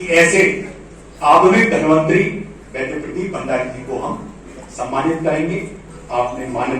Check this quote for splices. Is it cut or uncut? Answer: cut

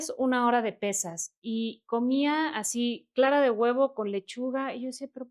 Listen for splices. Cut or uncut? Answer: uncut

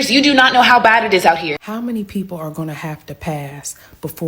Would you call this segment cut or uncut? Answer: cut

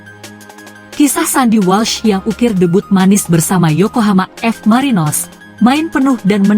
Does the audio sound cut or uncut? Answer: cut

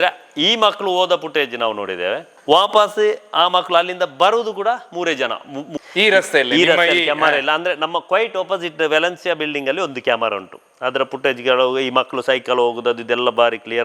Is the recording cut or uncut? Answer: cut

